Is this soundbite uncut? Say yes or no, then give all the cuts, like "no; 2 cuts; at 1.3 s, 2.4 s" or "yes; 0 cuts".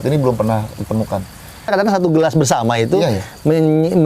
no; 1 cut; at 1.7 s